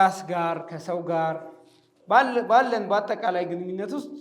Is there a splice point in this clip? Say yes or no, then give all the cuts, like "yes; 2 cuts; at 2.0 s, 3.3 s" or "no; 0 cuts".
no; 0 cuts